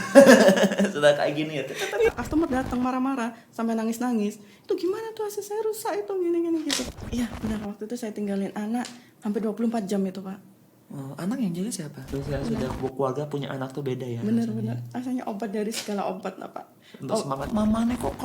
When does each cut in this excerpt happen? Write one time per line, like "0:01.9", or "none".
0:02.1
0:06.8
0:12.1
0:17.5